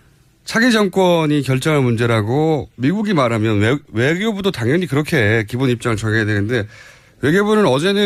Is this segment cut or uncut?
uncut